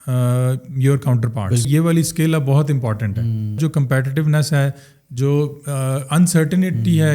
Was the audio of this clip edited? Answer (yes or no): yes